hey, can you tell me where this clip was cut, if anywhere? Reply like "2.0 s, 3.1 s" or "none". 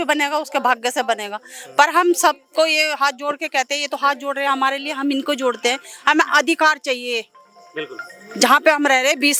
none